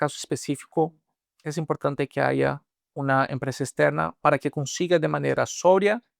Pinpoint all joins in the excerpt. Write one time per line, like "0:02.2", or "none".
none